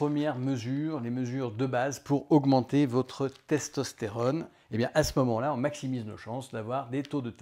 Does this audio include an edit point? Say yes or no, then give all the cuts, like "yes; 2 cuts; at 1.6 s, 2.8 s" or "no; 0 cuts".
yes; 1 cut; at 4.6 s